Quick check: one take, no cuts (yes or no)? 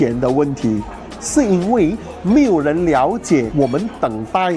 yes